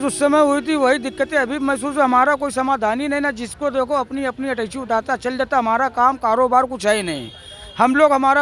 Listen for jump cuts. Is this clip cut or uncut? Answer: uncut